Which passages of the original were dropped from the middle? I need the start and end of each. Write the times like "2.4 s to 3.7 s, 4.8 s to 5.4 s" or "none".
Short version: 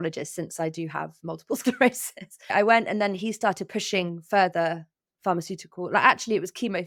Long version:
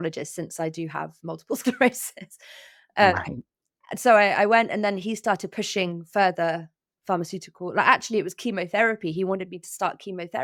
2.5 s to 4.3 s